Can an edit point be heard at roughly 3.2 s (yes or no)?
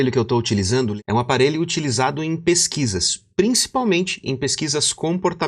no